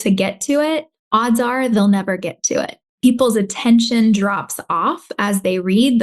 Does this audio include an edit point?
yes; 1 cut; at 2.8 s

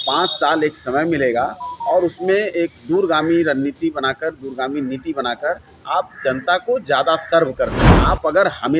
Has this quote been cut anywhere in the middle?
yes; 1 cut; at 7.9 s

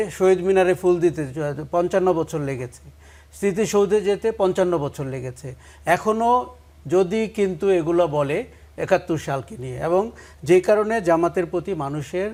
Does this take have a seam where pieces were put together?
no; 0 cuts

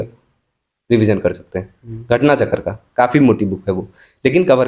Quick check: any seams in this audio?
no; 0 cuts

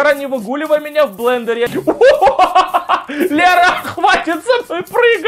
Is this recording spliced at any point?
yes; 1 cut; at 1.7 s

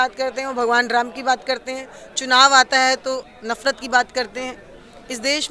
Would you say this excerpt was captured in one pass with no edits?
yes; 0 cuts

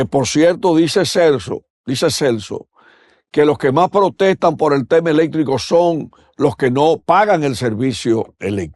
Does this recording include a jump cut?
no; 0 cuts

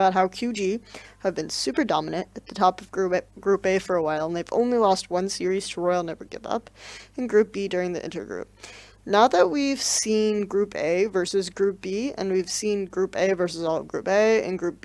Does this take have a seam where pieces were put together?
yes; 1 cut; at 11.7 s

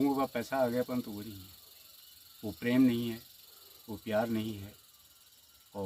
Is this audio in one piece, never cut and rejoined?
yes; 0 cuts

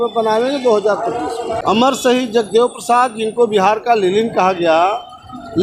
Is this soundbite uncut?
no; 1 cut; at 1.6 s

